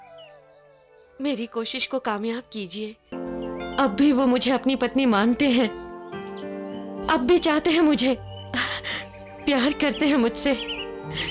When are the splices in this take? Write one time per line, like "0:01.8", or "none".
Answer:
0:03.1